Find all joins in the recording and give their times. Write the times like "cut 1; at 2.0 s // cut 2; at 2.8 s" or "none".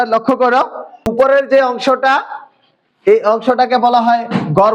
cut 1; at 1.1 s